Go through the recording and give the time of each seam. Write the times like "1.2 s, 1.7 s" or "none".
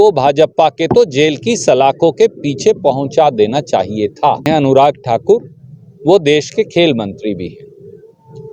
4.5 s